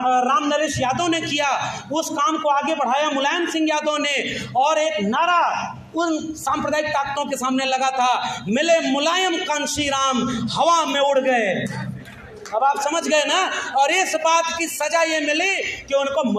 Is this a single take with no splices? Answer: yes; 0 cuts

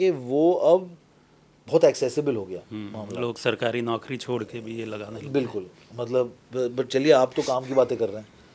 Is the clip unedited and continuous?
yes; 0 cuts

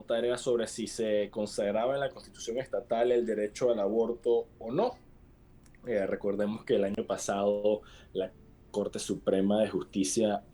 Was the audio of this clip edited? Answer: no; 0 cuts

